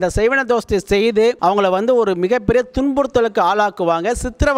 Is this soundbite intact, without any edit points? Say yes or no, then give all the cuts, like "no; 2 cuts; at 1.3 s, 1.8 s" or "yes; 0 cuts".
no; 1 cut; at 1.4 s